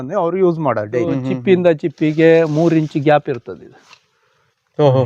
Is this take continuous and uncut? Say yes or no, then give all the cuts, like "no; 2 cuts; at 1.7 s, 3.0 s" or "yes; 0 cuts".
no; 1 cut; at 1.3 s